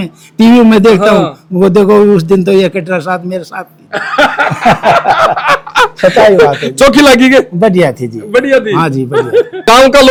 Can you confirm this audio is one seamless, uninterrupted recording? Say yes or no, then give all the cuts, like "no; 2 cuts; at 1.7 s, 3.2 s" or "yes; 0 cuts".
yes; 0 cuts